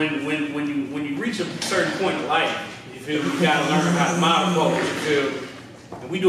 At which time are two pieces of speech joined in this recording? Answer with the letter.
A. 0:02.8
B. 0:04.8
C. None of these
C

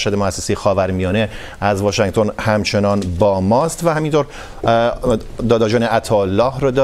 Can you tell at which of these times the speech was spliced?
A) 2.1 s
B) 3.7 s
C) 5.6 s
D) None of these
D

